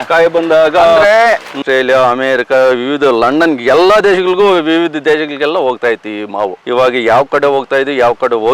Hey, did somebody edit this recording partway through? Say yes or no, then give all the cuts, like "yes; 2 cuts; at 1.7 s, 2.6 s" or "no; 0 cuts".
yes; 1 cut; at 1.6 s